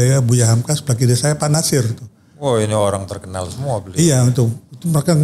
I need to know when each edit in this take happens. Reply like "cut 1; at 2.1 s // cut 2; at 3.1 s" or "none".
none